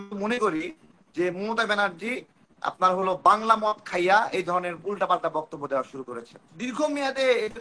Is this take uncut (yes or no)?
no